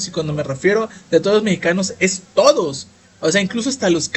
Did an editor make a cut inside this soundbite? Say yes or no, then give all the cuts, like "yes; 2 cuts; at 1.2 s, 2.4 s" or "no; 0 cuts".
no; 0 cuts